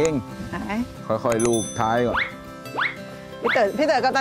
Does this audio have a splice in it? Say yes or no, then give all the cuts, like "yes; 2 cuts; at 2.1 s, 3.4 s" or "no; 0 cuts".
no; 0 cuts